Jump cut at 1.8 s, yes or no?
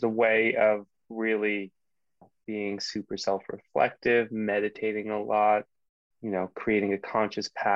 no